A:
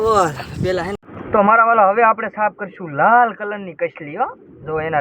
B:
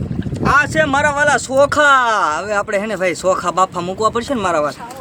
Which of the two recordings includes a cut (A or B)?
A